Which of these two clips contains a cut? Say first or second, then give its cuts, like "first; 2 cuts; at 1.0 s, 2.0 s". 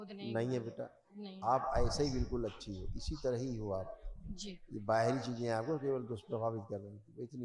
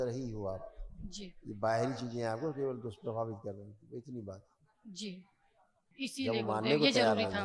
second; 1 cut; at 5.8 s